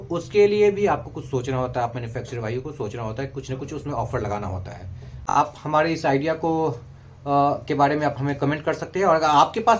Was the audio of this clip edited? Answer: yes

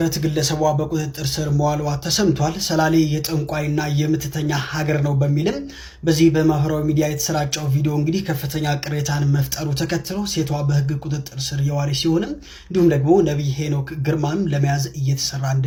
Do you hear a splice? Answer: no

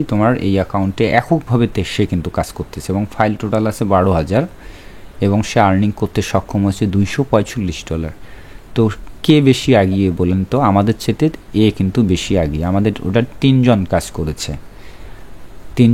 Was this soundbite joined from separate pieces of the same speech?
no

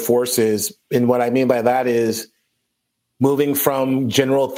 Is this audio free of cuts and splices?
yes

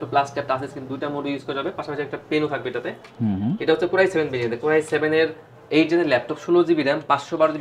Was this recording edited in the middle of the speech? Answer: no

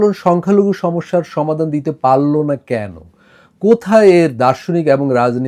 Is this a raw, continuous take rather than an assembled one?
yes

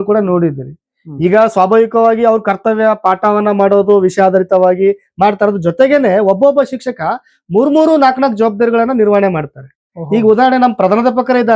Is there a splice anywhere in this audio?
no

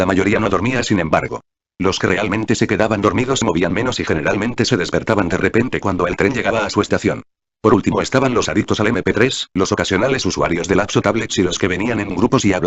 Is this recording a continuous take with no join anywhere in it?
no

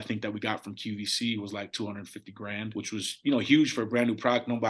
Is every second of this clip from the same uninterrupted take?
no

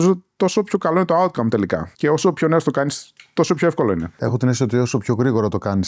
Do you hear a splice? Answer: yes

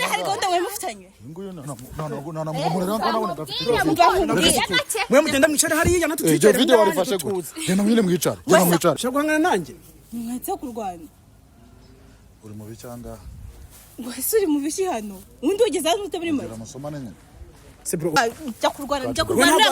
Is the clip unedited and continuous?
no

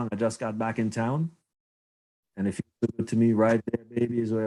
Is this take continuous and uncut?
yes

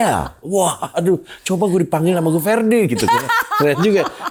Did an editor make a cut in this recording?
no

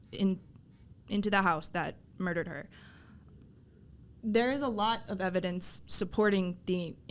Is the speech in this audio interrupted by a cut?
no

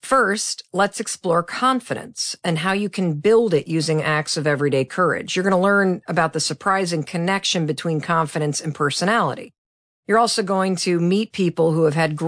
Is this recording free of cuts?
yes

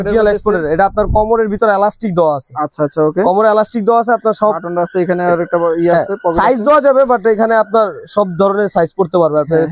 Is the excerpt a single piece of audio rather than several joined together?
yes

